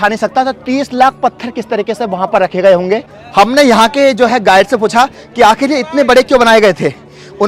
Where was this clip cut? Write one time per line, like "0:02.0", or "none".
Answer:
none